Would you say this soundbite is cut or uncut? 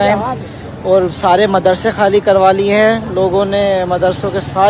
uncut